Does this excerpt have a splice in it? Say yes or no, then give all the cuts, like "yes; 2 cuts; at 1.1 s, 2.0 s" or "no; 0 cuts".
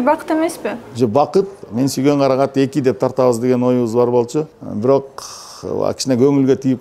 yes; 2 cuts; at 1.6 s, 4.6 s